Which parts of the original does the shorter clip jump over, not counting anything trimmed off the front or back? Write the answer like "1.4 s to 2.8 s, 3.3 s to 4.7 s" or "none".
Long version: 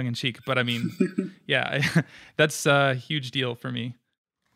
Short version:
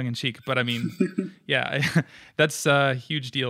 none